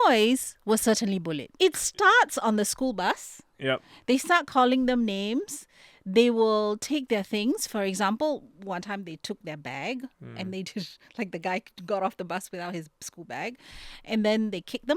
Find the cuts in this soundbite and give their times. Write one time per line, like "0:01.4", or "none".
0:01.5